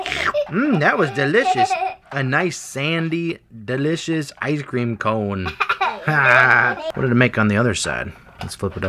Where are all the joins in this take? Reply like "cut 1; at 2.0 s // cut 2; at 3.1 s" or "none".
cut 1; at 6.9 s